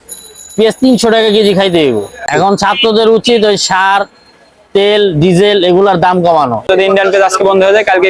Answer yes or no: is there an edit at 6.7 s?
yes